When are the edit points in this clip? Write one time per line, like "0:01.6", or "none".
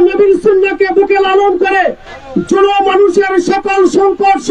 none

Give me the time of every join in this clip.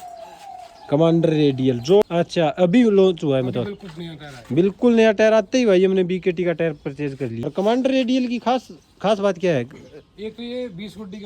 0:02.0
0:07.4

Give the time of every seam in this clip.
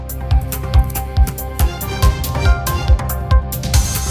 0:03.0

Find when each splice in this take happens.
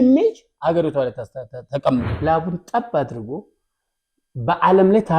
0:02.1

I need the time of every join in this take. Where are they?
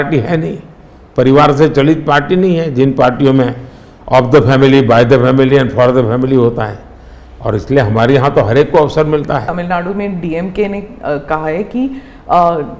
0:09.5

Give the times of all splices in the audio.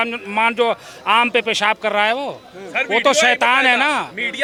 none

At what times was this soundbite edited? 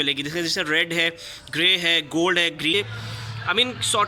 0:02.7

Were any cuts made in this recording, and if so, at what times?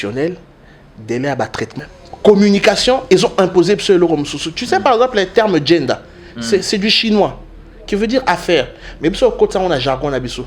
0:01.8

